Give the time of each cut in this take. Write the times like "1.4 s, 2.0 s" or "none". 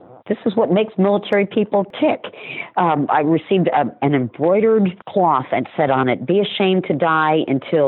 1.9 s, 5.0 s